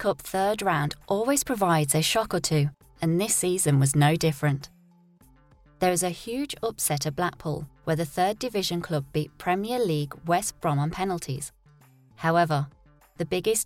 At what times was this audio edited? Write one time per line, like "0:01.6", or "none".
none